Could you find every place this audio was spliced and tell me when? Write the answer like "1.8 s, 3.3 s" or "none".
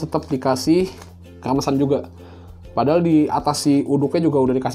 none

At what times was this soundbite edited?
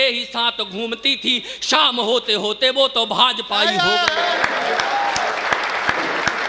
none

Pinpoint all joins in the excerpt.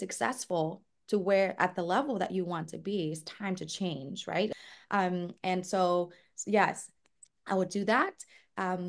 4.5 s

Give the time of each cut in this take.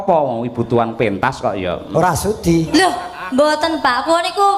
2.7 s

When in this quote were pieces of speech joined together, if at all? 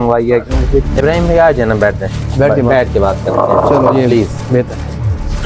none

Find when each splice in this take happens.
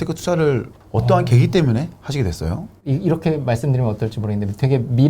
2.7 s

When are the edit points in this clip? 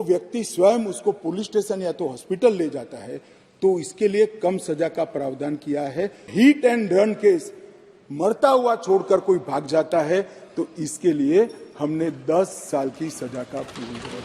6.3 s

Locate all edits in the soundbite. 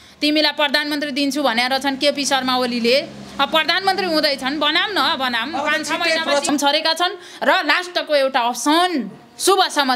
6.5 s

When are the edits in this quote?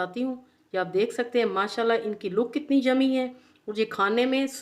none

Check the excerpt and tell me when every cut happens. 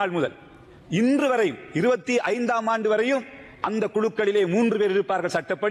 none

